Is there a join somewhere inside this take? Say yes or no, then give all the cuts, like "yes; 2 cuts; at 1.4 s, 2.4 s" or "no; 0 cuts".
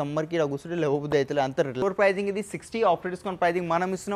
yes; 1 cut; at 1.8 s